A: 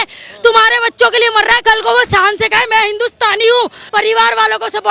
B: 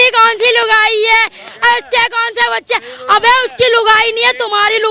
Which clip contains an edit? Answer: A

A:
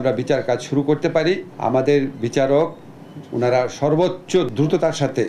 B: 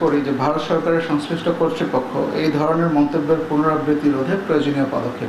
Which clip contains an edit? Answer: A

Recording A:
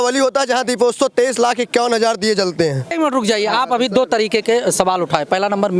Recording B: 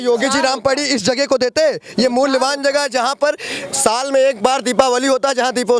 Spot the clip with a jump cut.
A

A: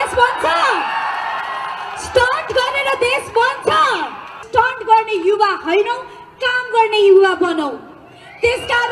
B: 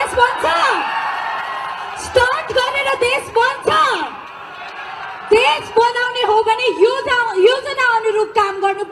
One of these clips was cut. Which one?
A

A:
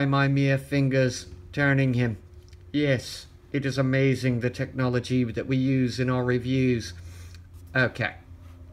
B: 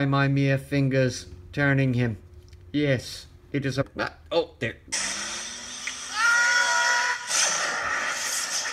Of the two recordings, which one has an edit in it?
A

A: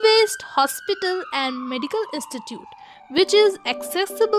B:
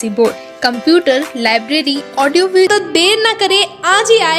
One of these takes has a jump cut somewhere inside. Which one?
B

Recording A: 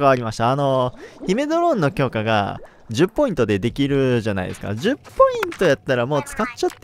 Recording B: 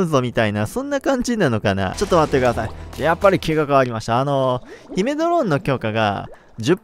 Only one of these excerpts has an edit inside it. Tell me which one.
B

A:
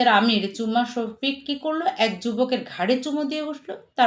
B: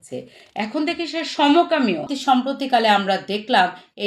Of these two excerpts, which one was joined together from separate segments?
B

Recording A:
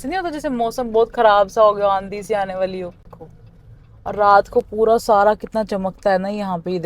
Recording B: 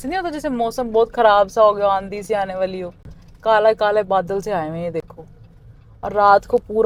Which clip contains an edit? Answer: A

